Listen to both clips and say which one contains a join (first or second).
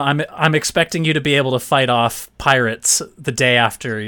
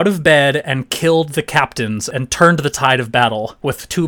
second